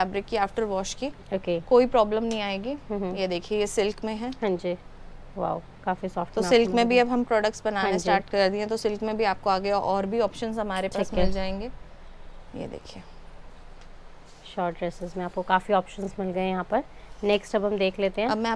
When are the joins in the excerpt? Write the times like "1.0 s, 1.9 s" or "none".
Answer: none